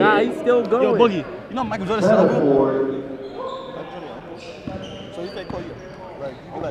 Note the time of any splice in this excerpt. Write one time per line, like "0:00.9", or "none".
none

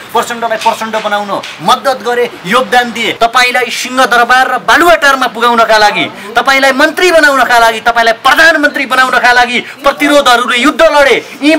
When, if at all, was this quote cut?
0:03.1

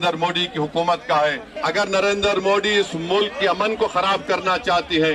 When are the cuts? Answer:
0:01.5

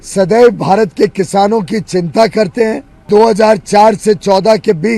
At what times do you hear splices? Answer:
0:03.0

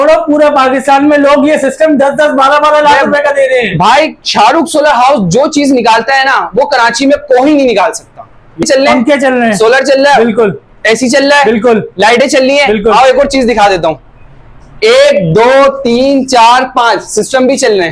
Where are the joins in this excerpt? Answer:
0:08.6

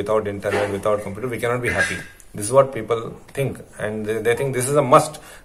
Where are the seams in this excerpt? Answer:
none

